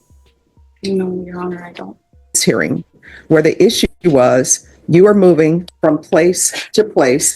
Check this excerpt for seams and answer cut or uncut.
cut